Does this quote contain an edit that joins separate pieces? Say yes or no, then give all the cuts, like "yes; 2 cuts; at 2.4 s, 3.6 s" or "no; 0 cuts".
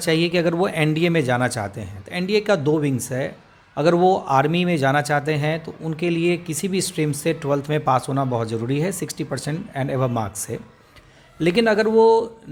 no; 0 cuts